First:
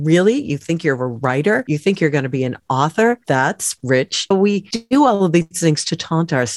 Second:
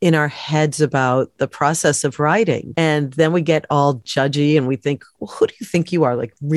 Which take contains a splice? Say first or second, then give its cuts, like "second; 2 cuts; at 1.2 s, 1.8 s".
first; 2 cuts; at 3.2 s, 4.4 s